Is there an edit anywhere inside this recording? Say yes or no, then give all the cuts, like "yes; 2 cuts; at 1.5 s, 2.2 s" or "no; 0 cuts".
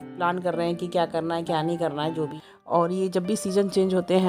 yes; 1 cut; at 2.4 s